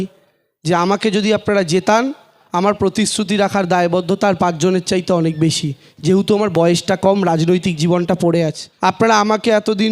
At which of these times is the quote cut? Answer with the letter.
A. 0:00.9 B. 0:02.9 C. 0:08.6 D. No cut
C